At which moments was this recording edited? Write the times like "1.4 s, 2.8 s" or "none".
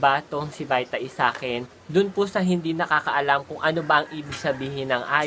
1.8 s